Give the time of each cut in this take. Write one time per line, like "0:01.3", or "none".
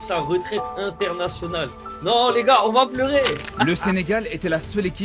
0:03.6